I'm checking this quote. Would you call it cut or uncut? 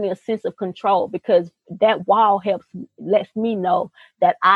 uncut